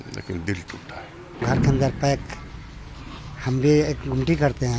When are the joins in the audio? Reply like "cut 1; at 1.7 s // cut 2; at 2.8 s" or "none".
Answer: cut 1; at 1.4 s